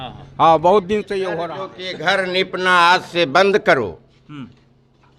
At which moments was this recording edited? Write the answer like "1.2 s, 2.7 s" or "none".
1.3 s

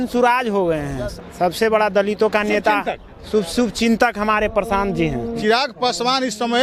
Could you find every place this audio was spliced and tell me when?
1.0 s, 5.4 s

